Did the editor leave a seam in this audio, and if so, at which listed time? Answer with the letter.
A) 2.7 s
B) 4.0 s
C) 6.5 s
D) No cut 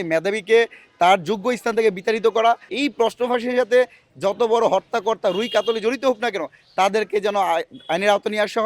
A